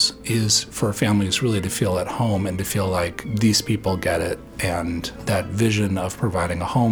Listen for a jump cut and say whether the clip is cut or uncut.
cut